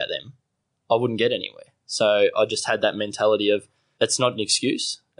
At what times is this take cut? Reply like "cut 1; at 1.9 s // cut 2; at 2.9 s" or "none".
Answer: cut 1; at 3.8 s

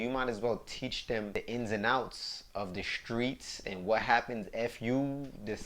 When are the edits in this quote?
cut 1; at 1.3 s

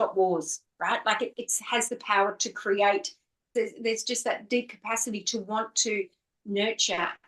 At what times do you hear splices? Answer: cut 1; at 3.4 s

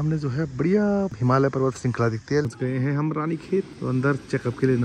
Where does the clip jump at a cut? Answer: cut 1; at 1.1 s // cut 2; at 2.4 s // cut 3; at 3.7 s

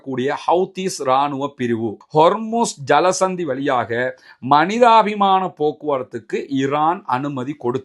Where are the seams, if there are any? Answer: cut 1; at 2.0 s

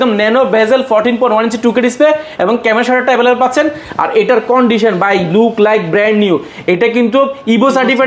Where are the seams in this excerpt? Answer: none

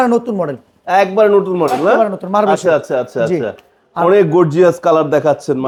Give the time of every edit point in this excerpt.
none

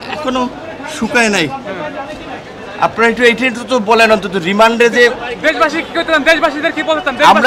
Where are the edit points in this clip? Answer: none

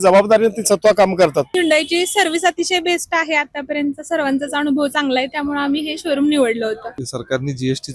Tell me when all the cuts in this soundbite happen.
cut 1; at 1.5 s // cut 2; at 6.9 s

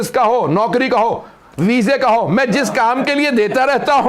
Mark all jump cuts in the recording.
none

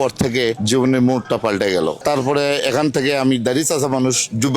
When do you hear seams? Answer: cut 1; at 2.0 s

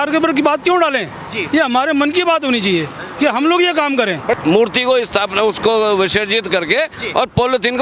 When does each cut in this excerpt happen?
cut 1; at 4.4 s

